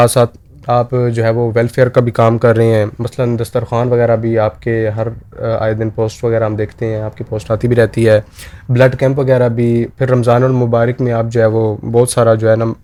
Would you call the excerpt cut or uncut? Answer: uncut